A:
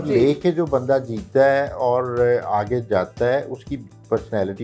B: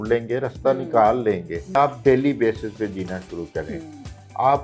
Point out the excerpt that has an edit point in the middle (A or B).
B